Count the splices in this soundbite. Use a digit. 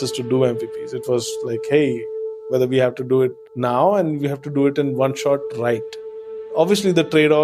1